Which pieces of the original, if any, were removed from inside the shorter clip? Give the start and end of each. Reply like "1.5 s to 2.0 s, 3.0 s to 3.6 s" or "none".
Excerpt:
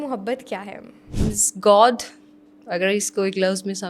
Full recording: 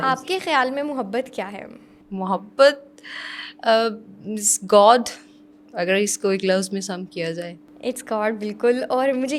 1.9 s to 4.1 s